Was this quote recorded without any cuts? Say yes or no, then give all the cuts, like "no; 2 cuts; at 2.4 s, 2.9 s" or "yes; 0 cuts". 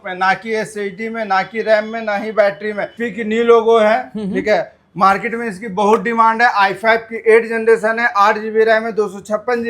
no; 1 cut; at 3.0 s